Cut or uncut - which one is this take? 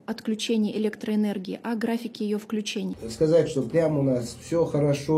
cut